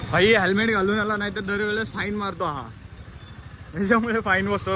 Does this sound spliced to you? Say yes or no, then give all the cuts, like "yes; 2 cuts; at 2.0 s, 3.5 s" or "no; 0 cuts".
no; 0 cuts